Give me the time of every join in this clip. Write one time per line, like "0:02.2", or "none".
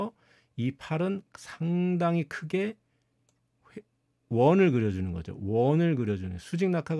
none

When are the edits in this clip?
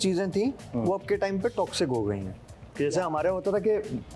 none

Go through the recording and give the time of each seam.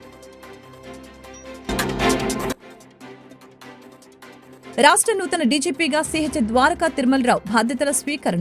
0:01.7

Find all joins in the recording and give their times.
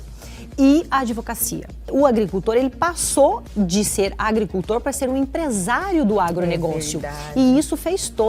0:01.9

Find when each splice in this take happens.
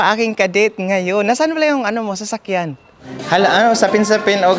0:03.2

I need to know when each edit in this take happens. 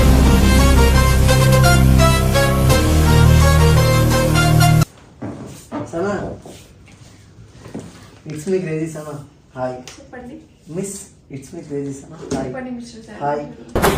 0:04.9

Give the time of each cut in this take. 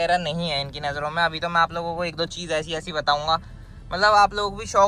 none

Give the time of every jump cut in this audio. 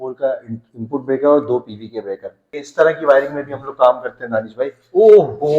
0:02.5

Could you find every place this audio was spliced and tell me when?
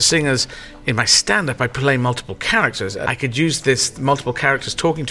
0:03.0

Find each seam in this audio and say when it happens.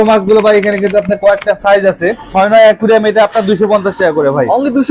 0:02.3

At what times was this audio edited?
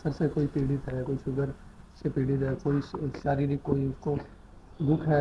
none

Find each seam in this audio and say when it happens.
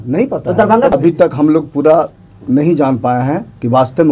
0:01.0

